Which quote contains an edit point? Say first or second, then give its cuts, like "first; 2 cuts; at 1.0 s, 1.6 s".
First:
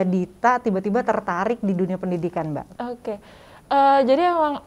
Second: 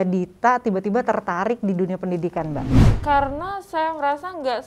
second; 1 cut; at 2.7 s